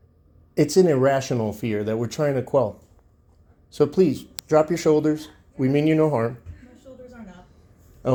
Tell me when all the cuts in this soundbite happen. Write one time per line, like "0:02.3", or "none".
none